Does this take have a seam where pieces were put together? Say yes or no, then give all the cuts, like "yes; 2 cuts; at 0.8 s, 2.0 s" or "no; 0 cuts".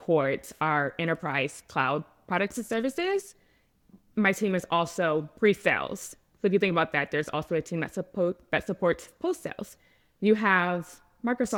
no; 0 cuts